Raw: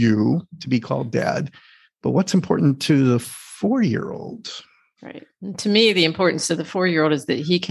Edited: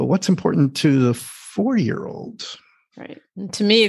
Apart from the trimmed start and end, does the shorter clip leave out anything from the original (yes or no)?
no